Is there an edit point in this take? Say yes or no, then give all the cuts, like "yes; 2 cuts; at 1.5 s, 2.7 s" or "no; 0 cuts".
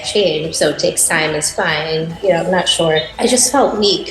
yes; 2 cuts; at 2.1 s, 3.1 s